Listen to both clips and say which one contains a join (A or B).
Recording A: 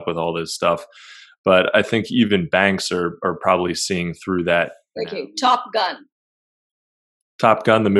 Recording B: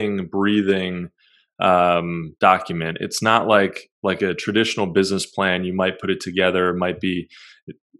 A